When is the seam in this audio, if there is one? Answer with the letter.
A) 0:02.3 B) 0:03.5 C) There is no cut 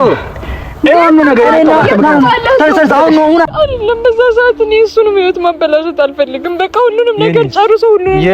B